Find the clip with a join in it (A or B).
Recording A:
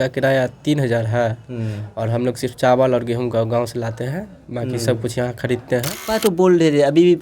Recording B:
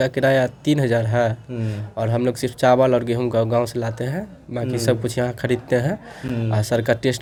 A